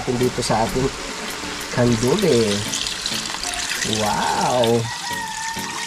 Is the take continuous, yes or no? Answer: yes